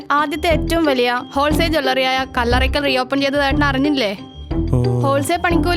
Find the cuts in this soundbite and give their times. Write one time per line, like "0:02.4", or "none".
none